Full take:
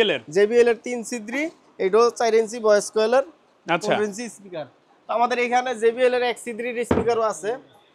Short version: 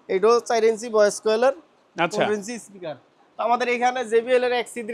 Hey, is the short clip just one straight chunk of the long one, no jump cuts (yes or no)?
yes